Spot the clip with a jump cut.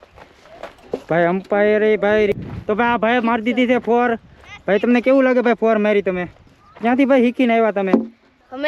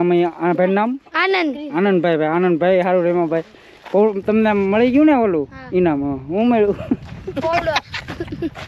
first; 2 cuts; at 2.3 s, 6.6 s

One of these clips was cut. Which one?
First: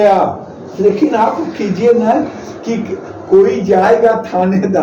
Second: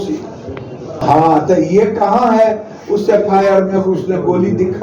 second; 1 cut; at 1.0 s

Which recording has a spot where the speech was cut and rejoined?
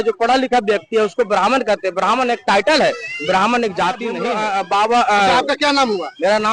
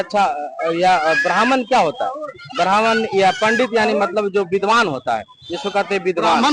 first; 1 cut; at 4.2 s

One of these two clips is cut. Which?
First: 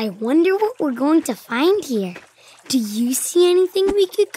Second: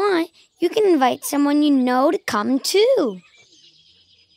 second; 1 cut; at 3.4 s

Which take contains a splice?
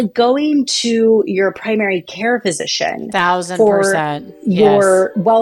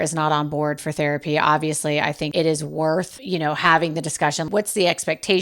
second; 3 cuts; at 2.3 s, 3.2 s, 4.5 s

